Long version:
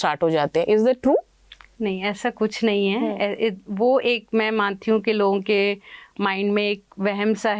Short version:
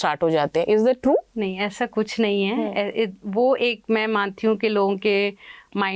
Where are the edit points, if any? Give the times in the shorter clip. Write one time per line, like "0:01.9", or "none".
0:01.3